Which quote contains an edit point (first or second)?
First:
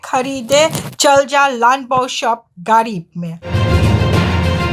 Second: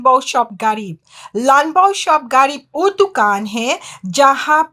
first